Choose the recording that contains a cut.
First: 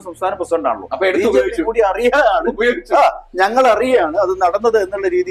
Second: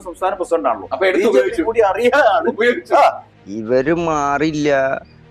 second; 1 cut; at 3.2 s

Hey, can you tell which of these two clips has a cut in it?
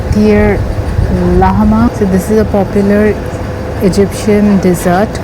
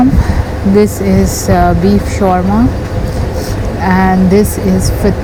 first; 1 cut; at 1.9 s

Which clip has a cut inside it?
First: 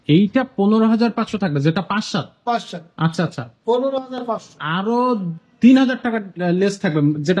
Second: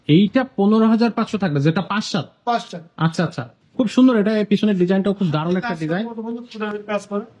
second; 1 cut; at 3.5 s

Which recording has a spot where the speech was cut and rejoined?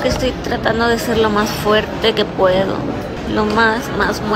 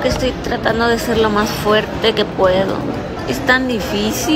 second; 1 cut; at 3.1 s

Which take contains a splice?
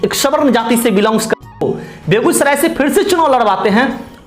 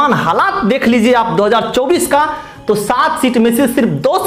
first; 1 cut; at 1.5 s

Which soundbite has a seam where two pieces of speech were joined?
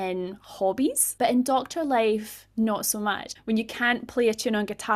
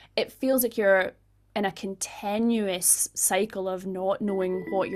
first; 2 cuts; at 1.0 s, 3.3 s

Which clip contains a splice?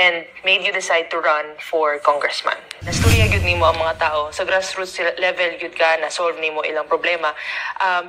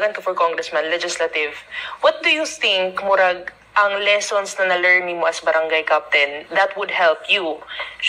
first; 1 cut; at 3.0 s

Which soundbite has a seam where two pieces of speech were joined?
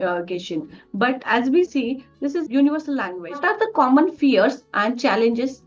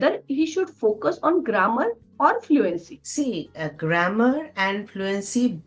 first; 2 cuts; at 1.7 s, 3.4 s

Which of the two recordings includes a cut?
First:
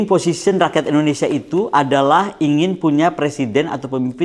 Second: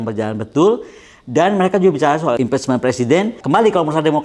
second; 2 cuts; at 2.4 s, 3.4 s

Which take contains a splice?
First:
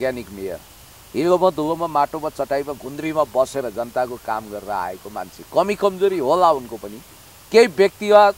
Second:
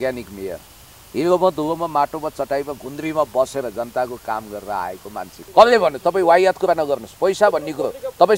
second; 1 cut; at 5.3 s

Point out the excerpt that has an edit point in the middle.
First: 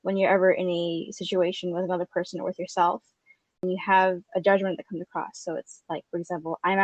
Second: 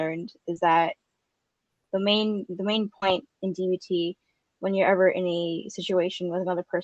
first; 1 cut; at 3.6 s

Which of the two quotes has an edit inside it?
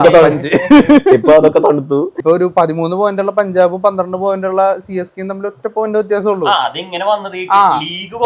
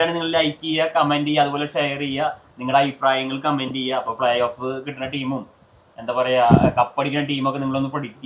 first; 1 cut; at 2.1 s

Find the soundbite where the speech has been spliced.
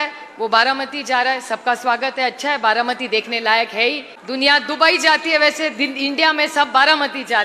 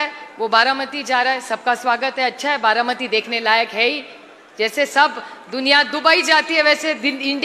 first; 1 cut; at 4.1 s

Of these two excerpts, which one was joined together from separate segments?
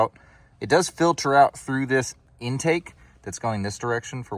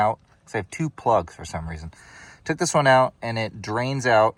first; 1 cut; at 2.2 s

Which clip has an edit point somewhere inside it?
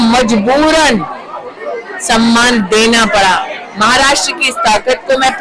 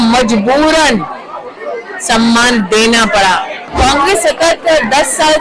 second; 1 cut; at 3.7 s

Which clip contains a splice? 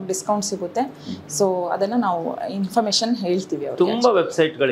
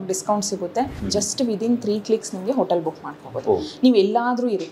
second; 1 cut; at 1.0 s

